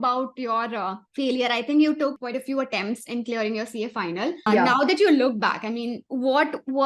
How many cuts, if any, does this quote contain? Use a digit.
4